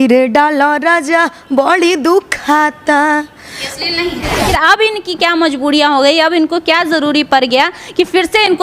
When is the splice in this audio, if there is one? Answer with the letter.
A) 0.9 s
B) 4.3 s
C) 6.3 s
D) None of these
B